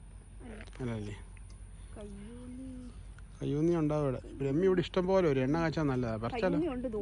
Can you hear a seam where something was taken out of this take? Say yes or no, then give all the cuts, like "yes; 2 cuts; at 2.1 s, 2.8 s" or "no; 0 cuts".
no; 0 cuts